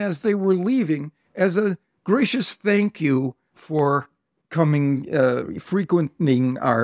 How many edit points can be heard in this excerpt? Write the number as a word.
zero